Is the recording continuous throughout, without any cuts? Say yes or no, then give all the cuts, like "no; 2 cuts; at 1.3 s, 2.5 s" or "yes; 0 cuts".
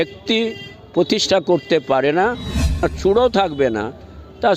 no; 1 cut; at 2.8 s